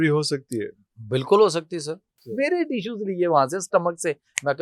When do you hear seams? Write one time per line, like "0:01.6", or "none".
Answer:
0:02.3